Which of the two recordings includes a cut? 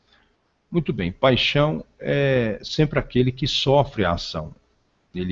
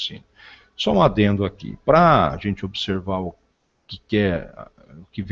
second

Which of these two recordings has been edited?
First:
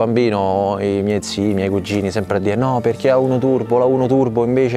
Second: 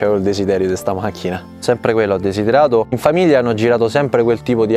second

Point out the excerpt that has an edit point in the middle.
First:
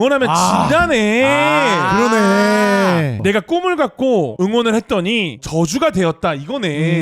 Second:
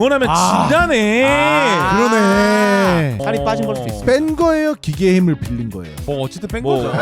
second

